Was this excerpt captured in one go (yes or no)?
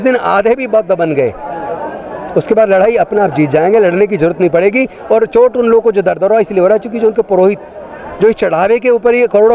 yes